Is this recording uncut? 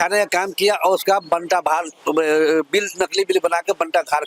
yes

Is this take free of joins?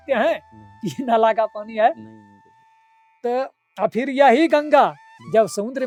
yes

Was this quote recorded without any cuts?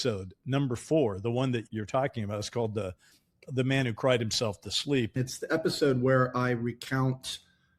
no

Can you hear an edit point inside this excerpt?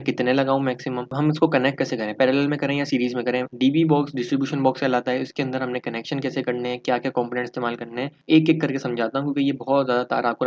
yes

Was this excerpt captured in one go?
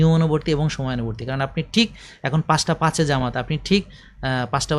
yes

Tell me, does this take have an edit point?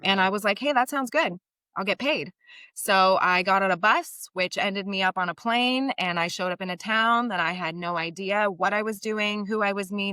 no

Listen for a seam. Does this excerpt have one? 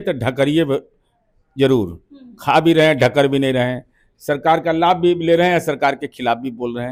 no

